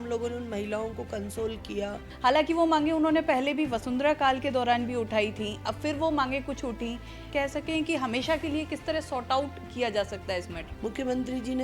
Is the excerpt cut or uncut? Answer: cut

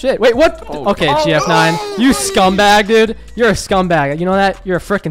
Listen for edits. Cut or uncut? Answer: uncut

